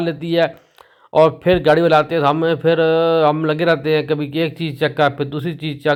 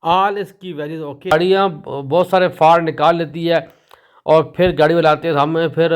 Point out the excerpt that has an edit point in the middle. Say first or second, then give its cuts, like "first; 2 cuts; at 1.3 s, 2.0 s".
second; 1 cut; at 1.3 s